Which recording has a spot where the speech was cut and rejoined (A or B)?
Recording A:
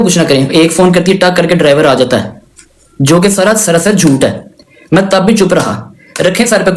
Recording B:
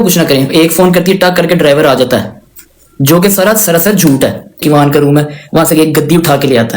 B